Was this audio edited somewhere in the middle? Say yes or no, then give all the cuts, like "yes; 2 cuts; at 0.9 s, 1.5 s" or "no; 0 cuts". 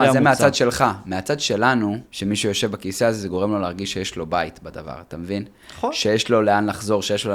yes; 1 cut; at 2.1 s